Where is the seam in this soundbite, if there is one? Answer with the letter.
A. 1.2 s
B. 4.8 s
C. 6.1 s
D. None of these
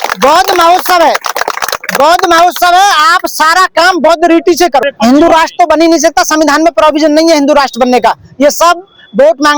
B